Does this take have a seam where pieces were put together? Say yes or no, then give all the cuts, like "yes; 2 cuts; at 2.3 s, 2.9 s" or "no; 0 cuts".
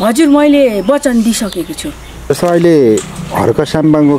yes; 1 cut; at 2.3 s